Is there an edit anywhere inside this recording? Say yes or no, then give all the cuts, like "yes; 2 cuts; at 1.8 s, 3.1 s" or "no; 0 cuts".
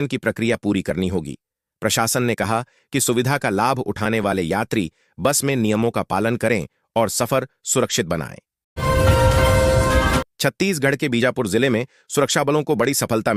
no; 0 cuts